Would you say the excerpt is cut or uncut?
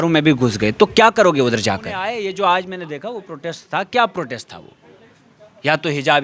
cut